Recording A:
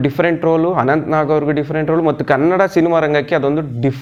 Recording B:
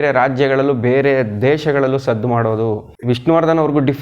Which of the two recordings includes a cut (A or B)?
B